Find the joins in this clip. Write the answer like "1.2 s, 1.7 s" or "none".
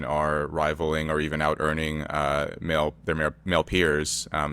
none